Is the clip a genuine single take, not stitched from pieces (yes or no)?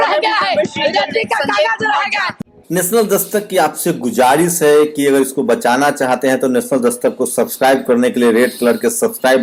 yes